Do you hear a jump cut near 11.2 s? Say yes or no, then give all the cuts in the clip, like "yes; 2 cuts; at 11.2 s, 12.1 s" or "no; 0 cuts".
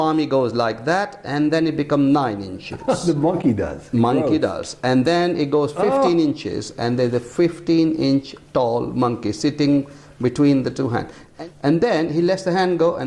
yes; 1 cut; at 11.2 s